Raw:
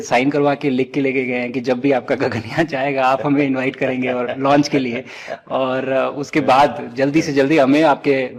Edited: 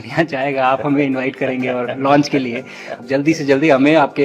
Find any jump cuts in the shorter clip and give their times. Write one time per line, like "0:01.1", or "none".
0:03.0